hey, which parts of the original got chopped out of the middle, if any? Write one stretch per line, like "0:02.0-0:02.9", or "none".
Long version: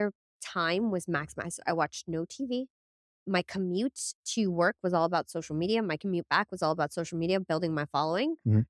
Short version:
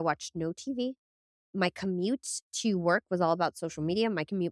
none